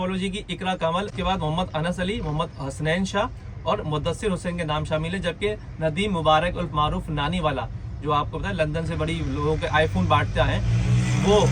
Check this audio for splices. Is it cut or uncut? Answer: uncut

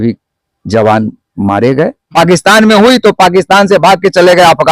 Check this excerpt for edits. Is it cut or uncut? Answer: cut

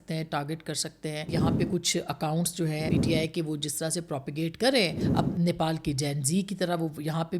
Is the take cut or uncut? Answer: cut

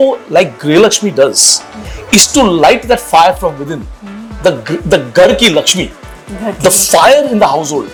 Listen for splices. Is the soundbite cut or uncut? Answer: uncut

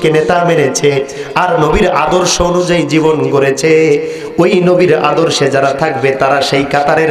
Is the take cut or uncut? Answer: uncut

